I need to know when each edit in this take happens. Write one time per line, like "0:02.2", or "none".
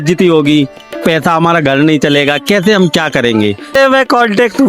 0:03.7